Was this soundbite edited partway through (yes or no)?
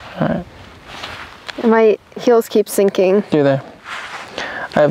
no